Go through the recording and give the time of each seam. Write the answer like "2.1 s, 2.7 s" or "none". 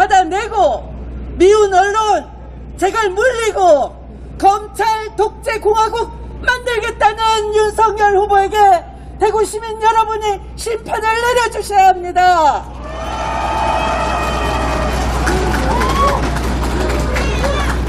none

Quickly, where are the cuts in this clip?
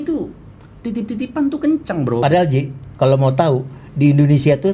2.2 s

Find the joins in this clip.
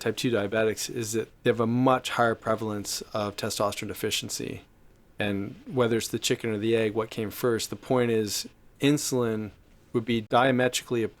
1.3 s, 10.2 s

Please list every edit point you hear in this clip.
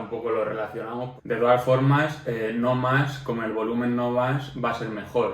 1.1 s

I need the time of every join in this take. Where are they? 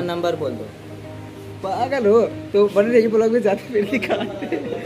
none

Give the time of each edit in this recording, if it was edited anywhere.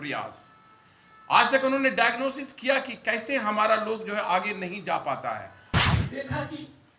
5.9 s

